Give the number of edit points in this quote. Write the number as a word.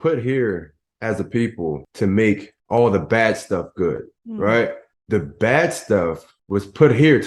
five